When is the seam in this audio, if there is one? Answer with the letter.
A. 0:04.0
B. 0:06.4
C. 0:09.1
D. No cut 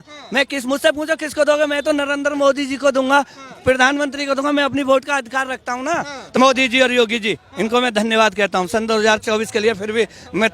B